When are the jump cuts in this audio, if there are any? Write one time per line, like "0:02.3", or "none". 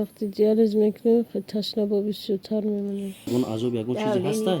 0:03.3